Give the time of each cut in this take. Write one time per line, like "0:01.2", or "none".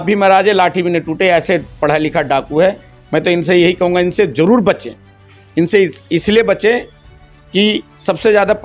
none